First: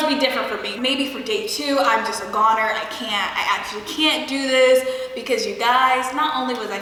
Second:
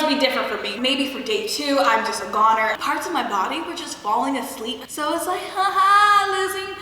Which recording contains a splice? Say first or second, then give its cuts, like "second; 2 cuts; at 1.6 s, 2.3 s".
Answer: second; 2 cuts; at 2.8 s, 4.8 s